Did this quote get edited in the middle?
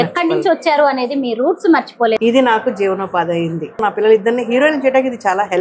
yes; 2 cuts; at 2.2 s, 3.8 s

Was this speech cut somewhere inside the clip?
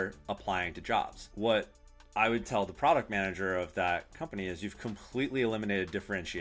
yes; 1 cut; at 1.2 s

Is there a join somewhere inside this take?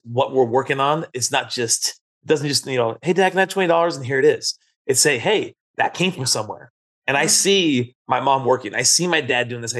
no; 0 cuts

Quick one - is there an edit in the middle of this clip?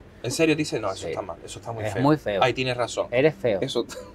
no; 0 cuts

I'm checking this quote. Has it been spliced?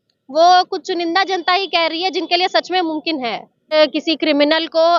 yes; 1 cut; at 3.7 s

